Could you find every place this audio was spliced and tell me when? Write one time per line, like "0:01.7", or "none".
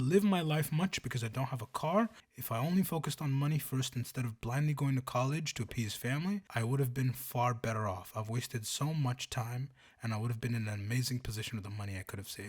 0:02.3
0:06.5